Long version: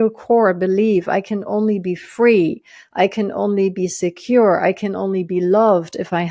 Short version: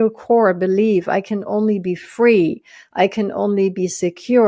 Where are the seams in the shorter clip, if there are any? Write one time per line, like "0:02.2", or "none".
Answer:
none